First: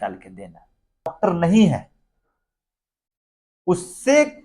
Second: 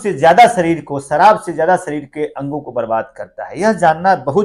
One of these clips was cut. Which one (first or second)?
first